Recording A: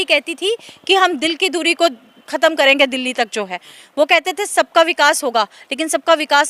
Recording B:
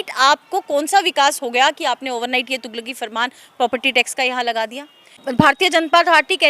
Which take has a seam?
B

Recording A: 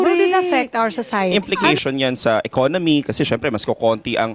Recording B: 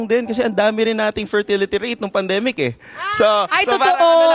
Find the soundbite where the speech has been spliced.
A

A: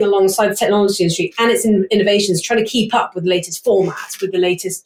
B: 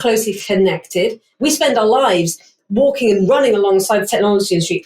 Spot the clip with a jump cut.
B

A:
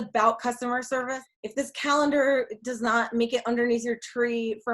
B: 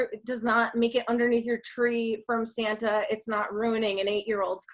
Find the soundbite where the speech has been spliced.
A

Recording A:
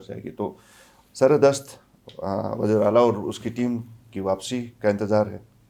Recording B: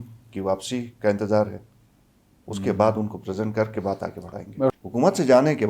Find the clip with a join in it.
B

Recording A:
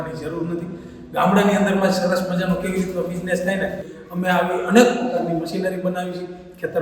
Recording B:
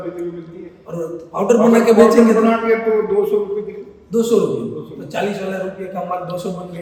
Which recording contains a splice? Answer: A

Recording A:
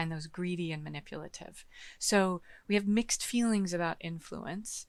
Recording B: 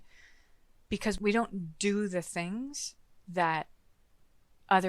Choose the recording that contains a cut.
B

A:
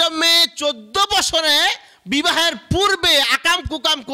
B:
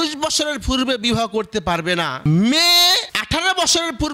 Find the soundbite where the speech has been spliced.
B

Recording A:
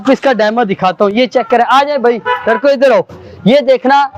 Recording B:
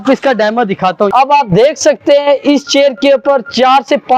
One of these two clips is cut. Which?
B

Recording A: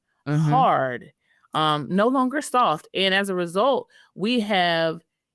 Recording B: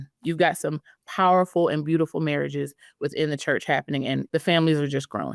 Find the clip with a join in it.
B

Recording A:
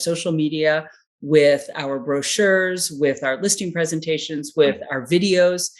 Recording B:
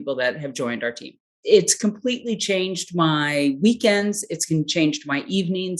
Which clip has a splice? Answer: B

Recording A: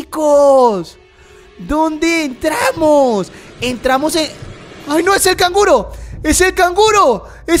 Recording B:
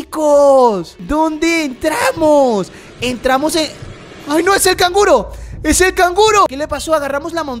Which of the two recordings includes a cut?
B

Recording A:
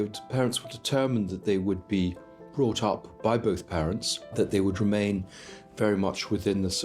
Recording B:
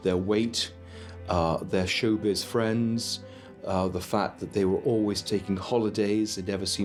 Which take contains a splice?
A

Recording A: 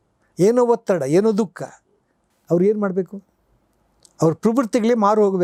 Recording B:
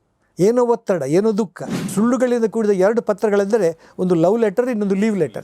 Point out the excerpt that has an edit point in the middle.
B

